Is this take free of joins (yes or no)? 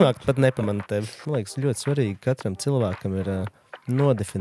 no